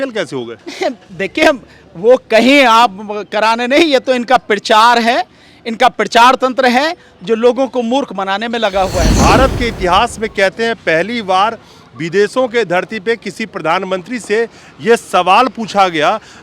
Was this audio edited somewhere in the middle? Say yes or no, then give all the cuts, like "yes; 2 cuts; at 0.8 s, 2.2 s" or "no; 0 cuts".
yes; 1 cut; at 9.1 s